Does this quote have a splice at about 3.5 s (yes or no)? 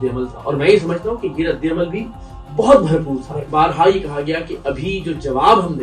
yes